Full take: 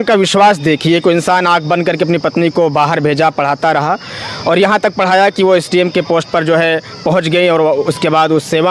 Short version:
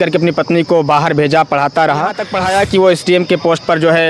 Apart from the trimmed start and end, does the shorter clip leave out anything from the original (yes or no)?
yes